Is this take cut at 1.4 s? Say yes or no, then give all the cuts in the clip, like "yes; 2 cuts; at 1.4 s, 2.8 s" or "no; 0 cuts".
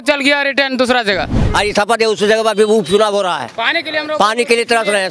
yes; 1 cut; at 1.4 s